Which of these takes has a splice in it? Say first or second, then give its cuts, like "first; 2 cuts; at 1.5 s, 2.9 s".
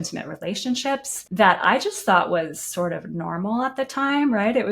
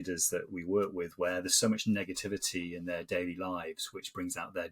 first; 1 cut; at 1.2 s